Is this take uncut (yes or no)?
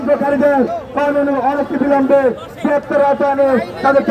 yes